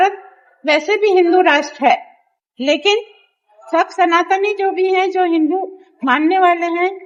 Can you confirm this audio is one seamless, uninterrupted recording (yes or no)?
yes